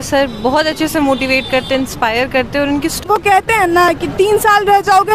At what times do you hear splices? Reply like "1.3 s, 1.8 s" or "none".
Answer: 1.9 s, 3.0 s

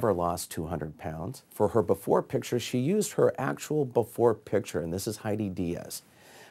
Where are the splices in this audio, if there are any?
1.5 s

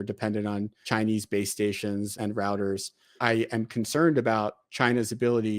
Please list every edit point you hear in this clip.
0.8 s, 2.1 s, 3.2 s

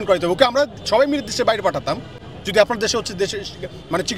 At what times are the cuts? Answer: none

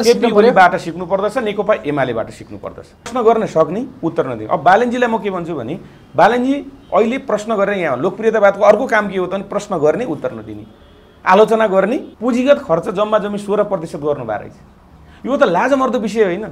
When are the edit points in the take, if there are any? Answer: 3.1 s, 12.1 s

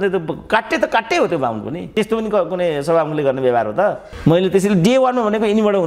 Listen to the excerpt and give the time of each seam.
1.8 s

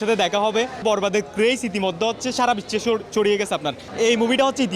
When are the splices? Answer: 0.8 s, 3.8 s

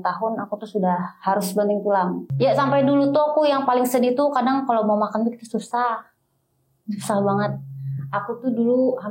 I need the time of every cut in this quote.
2.2 s

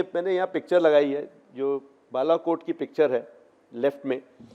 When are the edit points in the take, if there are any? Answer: none

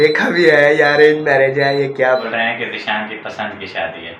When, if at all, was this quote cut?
2.2 s

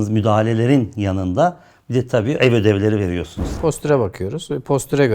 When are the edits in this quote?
3.4 s

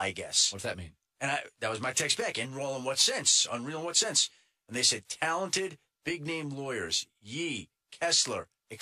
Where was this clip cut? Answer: 4.1 s

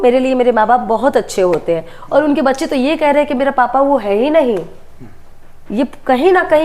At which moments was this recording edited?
none

